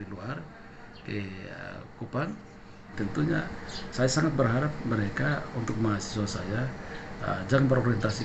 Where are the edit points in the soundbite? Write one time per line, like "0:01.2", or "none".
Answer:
0:02.9